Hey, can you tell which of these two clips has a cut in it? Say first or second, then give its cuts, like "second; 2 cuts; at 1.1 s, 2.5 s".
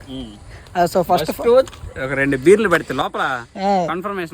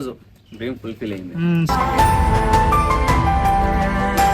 second; 1 cut; at 1.7 s